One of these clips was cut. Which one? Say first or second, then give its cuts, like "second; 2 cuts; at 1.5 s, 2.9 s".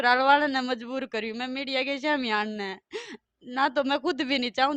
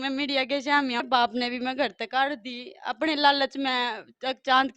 second; 1 cut; at 1.0 s